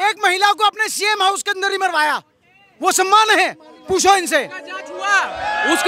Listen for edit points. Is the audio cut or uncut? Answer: uncut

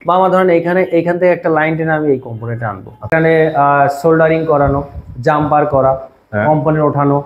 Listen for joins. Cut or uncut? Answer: cut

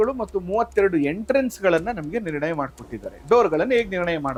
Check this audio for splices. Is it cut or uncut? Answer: uncut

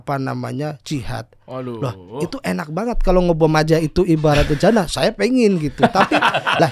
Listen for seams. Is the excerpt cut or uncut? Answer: uncut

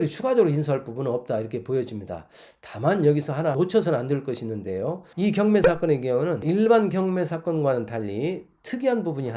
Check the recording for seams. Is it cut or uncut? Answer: cut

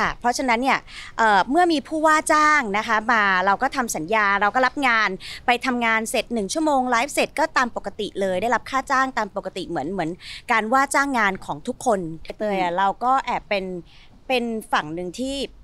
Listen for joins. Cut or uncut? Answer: cut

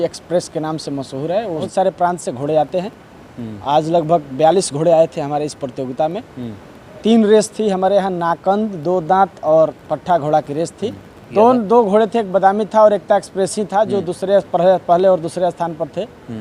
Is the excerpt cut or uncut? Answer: cut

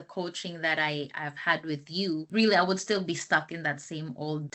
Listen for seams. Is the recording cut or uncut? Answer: uncut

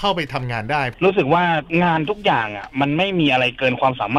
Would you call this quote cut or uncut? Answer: uncut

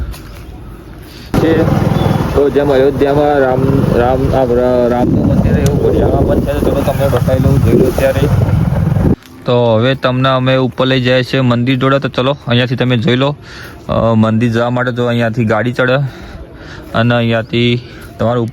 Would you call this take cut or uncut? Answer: cut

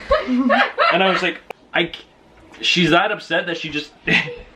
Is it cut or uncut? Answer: cut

